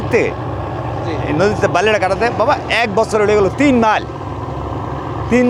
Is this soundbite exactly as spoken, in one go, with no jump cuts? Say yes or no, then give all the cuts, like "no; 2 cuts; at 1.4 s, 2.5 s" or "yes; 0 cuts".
yes; 0 cuts